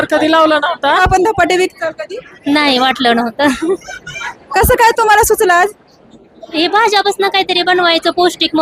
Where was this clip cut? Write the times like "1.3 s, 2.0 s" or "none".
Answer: 1.0 s